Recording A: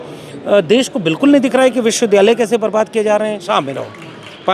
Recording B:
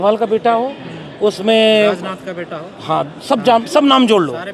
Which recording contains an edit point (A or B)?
A